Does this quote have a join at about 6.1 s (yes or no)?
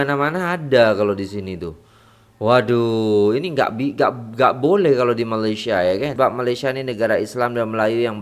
yes